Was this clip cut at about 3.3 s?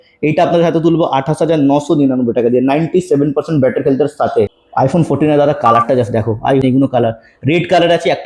no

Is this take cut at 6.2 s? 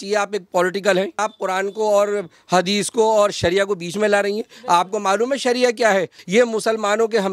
yes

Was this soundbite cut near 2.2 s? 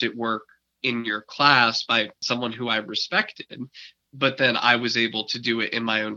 yes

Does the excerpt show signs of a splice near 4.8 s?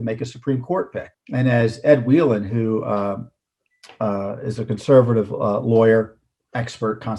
no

